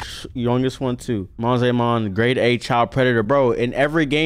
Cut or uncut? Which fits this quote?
cut